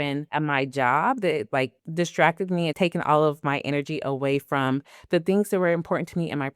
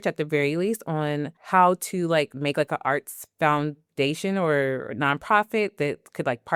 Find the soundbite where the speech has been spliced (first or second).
first